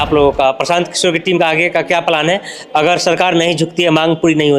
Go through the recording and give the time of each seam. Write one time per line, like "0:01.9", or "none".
none